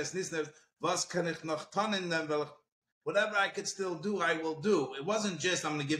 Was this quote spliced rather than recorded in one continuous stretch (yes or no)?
no